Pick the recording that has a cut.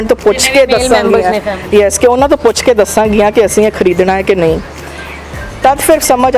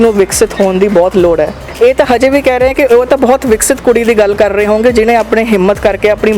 second; 1 cut; at 1.6 s

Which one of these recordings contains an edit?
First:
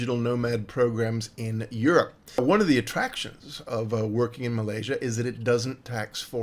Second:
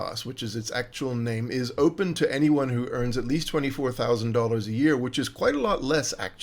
first; 1 cut; at 2.4 s

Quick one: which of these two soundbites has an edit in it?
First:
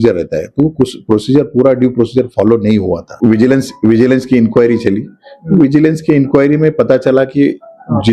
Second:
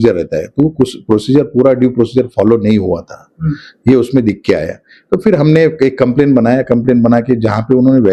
first; 1 cut; at 3.0 s

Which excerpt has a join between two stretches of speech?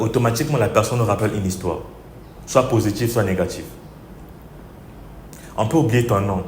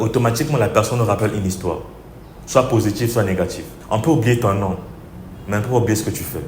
second; 1 cut; at 3.7 s

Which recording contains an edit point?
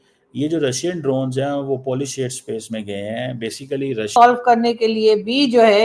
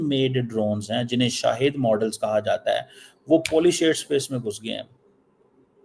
first; 1 cut; at 4.2 s

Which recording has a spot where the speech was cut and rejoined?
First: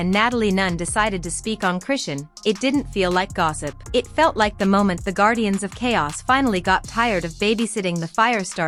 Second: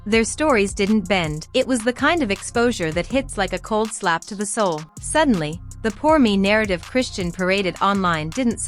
second; 2 cuts; at 1.4 s, 4.9 s

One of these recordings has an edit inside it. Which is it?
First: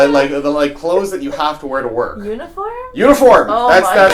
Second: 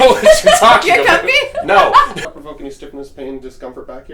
second; 1 cut; at 2.2 s

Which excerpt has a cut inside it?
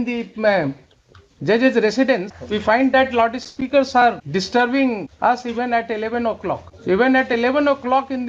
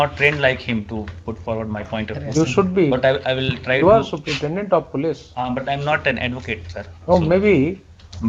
first; 4 cuts; at 2.3 s, 4.2 s, 5.1 s, 6.7 s

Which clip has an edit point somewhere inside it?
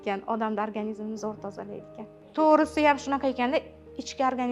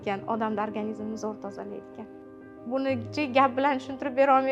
second; 1 cut; at 2.2 s

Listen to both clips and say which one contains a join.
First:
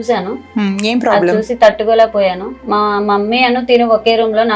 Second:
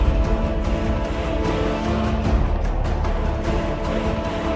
first; 1 cut; at 2.5 s

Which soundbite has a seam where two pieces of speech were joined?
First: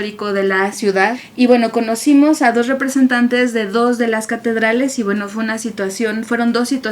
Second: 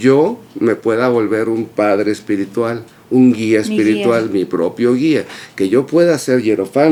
first; 1 cut; at 1.2 s

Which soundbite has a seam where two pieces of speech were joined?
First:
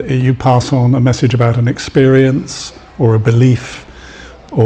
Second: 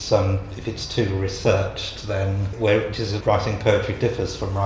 second; 2 cuts; at 2.5 s, 3.1 s

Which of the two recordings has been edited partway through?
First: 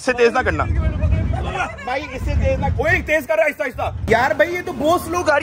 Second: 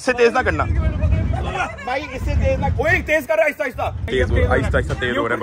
first; 1 cut; at 4.0 s

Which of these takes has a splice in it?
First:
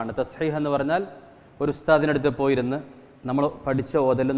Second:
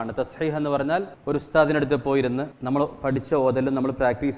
second; 2 cuts; at 1.1 s, 2.5 s

